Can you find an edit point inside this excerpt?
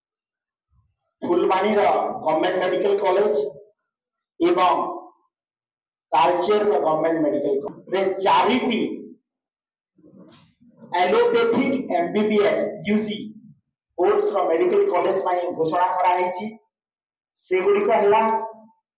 yes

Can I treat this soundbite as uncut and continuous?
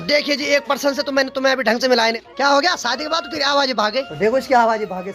no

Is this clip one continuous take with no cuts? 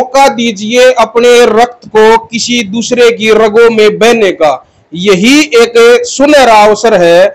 yes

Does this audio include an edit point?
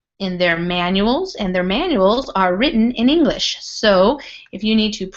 yes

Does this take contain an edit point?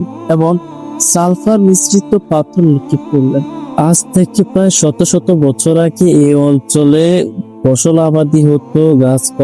yes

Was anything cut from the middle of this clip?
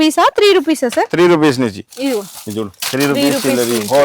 no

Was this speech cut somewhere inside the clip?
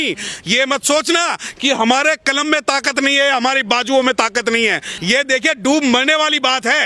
yes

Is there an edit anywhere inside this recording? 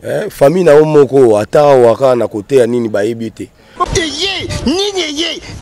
yes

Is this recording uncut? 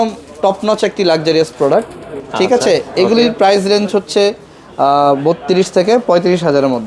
yes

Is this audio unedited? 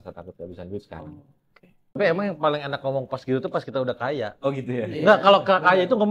no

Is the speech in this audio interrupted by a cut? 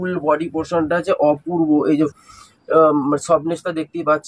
yes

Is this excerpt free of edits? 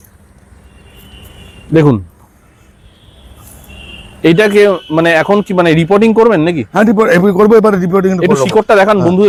yes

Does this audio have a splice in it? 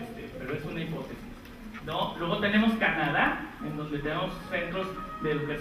no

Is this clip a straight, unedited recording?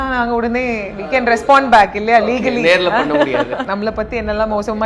no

